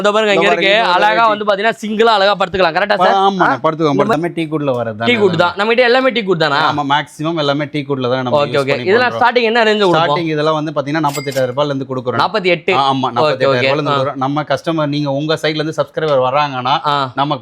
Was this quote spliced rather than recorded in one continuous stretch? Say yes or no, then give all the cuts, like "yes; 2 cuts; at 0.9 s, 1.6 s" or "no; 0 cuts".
yes; 1 cut; at 4.1 s